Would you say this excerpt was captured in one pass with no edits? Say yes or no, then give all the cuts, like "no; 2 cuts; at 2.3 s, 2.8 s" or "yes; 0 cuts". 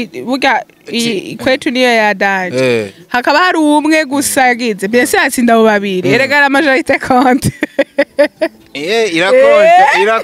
yes; 0 cuts